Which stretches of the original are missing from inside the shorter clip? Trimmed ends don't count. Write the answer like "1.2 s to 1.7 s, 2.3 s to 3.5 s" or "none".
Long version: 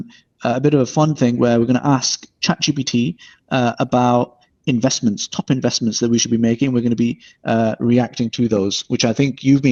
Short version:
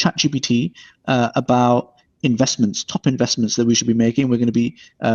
none